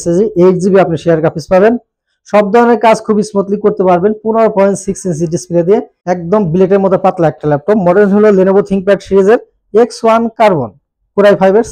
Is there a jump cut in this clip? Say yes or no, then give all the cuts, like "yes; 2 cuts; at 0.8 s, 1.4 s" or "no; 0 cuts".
yes; 1 cut; at 5.9 s